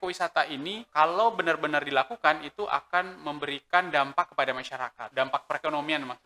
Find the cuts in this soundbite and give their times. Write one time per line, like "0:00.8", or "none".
0:00.9
0:05.0